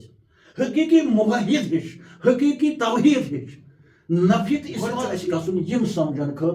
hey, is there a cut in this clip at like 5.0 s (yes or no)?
yes